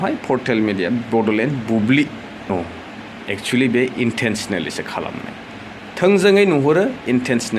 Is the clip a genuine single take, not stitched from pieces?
no; 1 cut; at 2.5 s

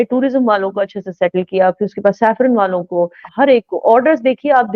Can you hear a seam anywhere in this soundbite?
yes; 1 cut; at 3.2 s

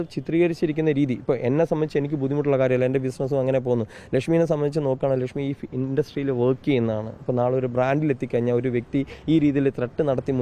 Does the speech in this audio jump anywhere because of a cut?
no; 0 cuts

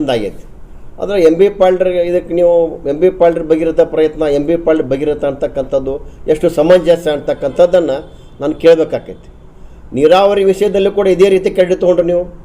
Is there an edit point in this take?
no; 0 cuts

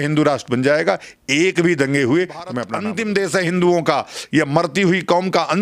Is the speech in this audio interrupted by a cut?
yes; 1 cut; at 2.7 s

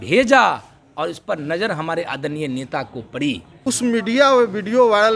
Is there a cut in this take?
yes; 1 cut; at 3.5 s

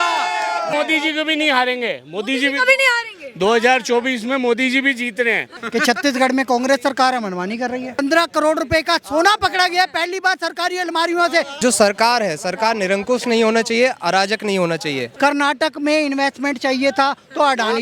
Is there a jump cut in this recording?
yes; 5 cuts; at 0.7 s, 5.6 s, 7.9 s, 11.5 s, 15.0 s

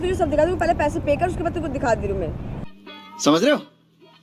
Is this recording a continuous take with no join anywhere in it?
no; 1 cut; at 2.8 s

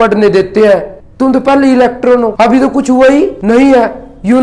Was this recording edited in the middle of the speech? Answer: yes; 3 cuts; at 0.9 s, 2.3 s, 3.4 s

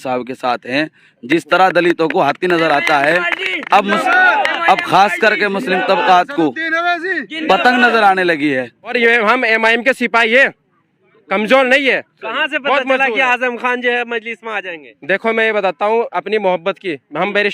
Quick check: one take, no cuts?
no; 1 cut; at 8.9 s

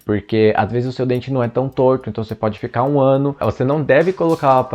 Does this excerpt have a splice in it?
yes; 1 cut; at 3.4 s

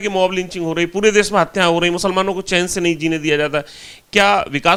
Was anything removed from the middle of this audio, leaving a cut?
no; 0 cuts

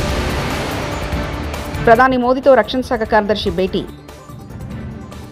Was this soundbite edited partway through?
no; 0 cuts

